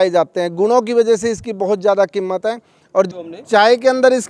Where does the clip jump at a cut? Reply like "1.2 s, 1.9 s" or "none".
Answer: 3.1 s